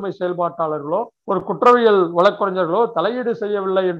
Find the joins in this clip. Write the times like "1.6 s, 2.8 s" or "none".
1.1 s